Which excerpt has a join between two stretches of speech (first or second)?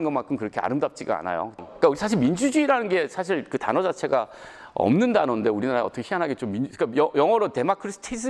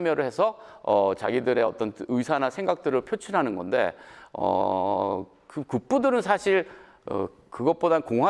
first